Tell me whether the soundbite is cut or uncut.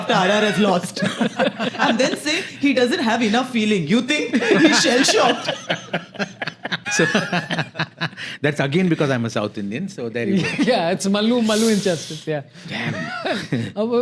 cut